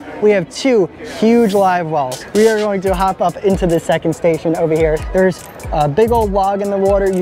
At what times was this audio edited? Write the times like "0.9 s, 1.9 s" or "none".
2.2 s, 5.0 s